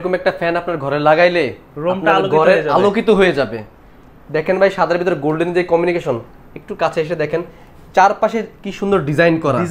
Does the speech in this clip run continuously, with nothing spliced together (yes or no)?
yes